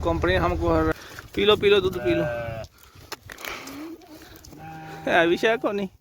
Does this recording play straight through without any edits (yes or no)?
no